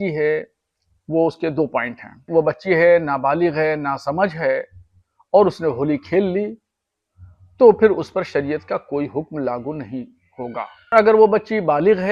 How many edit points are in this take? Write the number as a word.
two